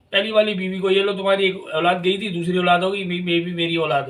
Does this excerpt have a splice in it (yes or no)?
no